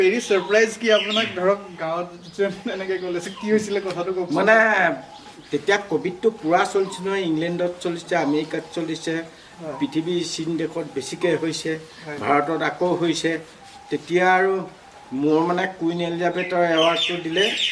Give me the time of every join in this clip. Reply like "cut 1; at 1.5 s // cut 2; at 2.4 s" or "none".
none